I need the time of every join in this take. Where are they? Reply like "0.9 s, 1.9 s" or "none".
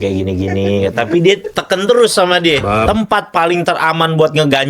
2.7 s